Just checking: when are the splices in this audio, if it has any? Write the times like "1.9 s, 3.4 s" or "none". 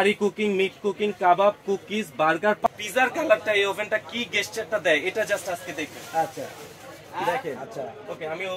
2.7 s, 7.5 s